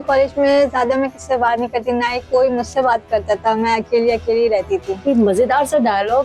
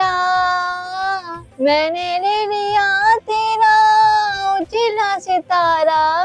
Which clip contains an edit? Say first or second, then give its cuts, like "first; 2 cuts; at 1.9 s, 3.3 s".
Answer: first; 1 cut; at 5.0 s